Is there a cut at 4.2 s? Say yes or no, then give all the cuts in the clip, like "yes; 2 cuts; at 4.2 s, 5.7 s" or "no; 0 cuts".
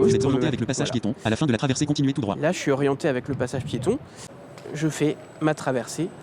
yes; 1 cut; at 4.2 s